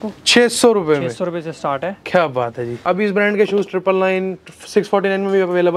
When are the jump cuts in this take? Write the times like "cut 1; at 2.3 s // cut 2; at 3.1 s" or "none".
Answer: cut 1; at 2.8 s

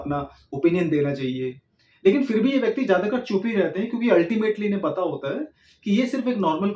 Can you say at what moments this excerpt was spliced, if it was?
none

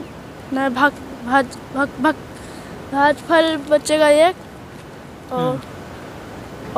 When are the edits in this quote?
none

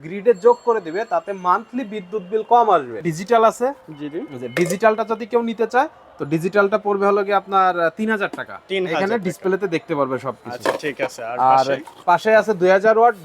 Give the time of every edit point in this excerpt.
cut 1; at 3.1 s

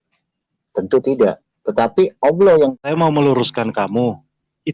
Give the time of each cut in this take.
cut 1; at 2.8 s

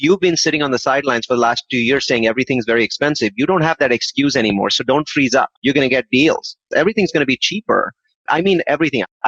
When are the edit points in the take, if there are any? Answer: cut 1; at 6.6 s // cut 2; at 8.1 s

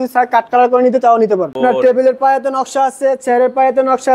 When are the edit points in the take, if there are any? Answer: cut 1; at 1.6 s

